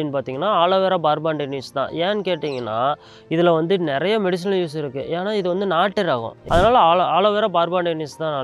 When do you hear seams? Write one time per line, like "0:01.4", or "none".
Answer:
0:06.3